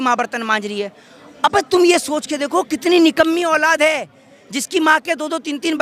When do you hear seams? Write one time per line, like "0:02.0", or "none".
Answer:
none